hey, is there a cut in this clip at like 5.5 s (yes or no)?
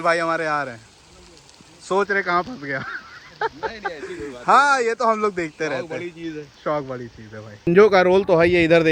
no